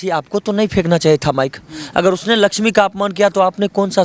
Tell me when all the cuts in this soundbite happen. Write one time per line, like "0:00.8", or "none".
none